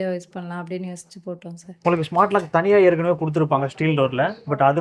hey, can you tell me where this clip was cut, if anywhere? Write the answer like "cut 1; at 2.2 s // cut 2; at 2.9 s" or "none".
cut 1; at 1.8 s